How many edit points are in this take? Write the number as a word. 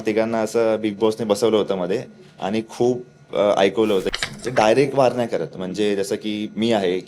one